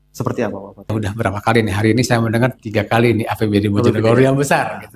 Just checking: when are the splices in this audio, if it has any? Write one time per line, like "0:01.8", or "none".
0:00.9

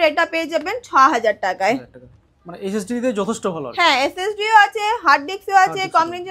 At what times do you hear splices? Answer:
none

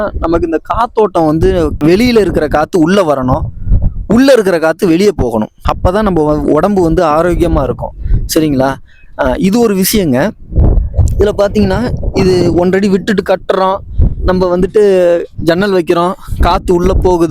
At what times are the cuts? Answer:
none

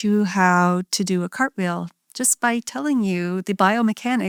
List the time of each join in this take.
none

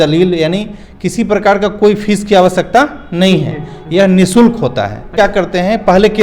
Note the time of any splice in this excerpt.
0:05.1

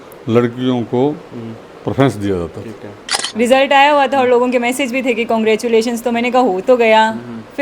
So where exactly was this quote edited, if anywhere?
0:03.2

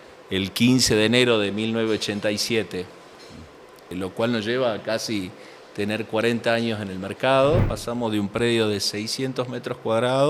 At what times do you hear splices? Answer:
0:03.9
0:07.7

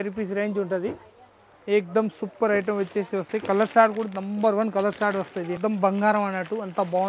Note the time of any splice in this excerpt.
0:05.6

